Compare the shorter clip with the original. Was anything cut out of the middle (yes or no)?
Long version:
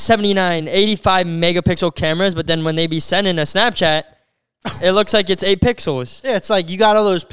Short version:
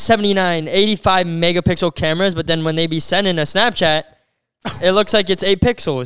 no